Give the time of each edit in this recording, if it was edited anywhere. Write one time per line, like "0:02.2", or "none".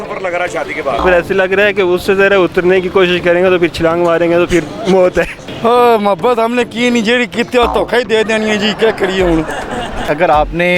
0:01.0
0:05.4
0:10.1